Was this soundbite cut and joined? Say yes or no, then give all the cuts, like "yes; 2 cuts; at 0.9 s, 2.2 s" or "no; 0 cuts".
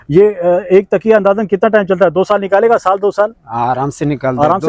no; 0 cuts